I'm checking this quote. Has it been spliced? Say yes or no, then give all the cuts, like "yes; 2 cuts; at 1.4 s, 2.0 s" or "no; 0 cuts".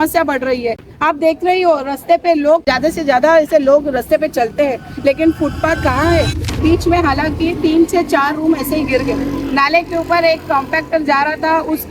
yes; 2 cuts; at 2.6 s, 6.5 s